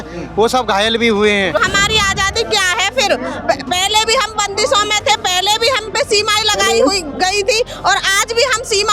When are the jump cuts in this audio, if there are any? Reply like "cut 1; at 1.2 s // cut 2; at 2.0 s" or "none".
cut 1; at 1.6 s